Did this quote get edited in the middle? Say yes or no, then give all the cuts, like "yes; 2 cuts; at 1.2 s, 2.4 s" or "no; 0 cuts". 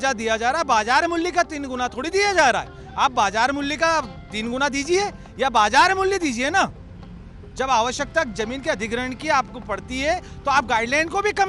no; 0 cuts